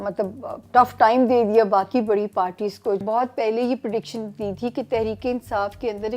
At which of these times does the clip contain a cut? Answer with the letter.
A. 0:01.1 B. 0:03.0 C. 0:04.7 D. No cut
B